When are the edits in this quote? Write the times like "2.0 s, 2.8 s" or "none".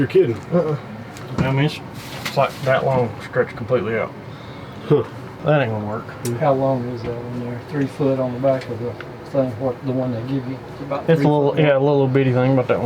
1.1 s, 6.2 s